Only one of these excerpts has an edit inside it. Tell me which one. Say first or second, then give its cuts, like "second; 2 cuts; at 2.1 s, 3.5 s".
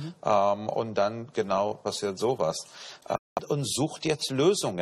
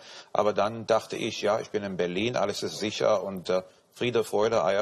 first; 1 cut; at 3.2 s